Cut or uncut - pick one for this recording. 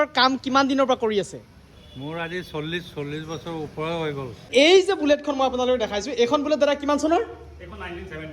cut